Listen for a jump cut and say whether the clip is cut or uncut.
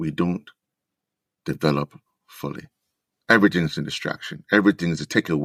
uncut